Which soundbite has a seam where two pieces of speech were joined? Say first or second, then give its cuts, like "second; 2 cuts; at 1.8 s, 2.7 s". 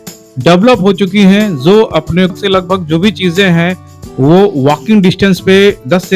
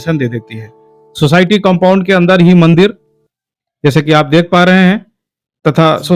first; 1 cut; at 2.3 s